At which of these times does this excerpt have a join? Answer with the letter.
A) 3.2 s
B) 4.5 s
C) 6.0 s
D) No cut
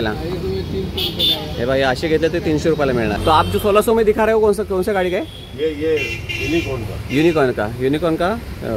A